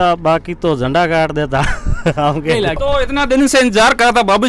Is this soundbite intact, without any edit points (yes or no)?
no